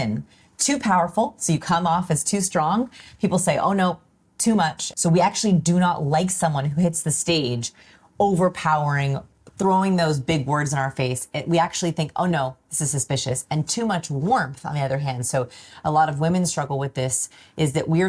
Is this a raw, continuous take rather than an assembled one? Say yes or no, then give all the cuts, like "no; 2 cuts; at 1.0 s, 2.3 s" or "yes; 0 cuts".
no; 1 cut; at 4.8 s